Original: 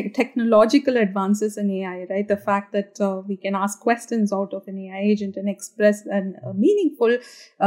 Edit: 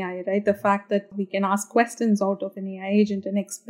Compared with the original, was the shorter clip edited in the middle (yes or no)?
yes